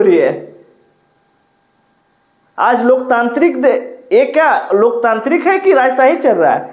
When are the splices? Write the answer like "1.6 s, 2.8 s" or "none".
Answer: none